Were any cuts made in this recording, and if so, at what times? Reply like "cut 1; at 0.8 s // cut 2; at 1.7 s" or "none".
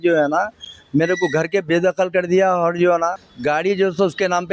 cut 1; at 3.2 s

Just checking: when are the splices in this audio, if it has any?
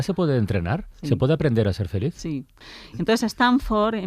cut 1; at 2.6 s

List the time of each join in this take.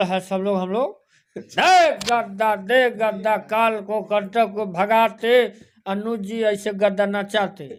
none

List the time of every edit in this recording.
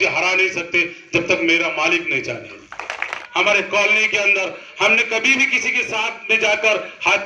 cut 1; at 3.2 s

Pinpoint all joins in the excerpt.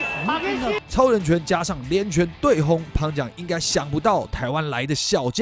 none

